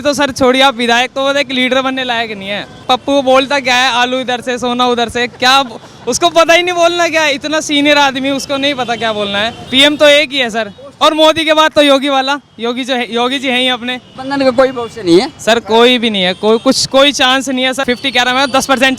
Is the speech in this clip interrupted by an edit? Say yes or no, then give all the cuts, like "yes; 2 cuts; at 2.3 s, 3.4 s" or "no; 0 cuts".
yes; 4 cuts; at 2.8 s, 9.6 s, 14.1 s, 17.8 s